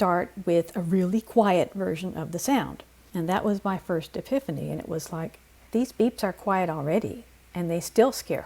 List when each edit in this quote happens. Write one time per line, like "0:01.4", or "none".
none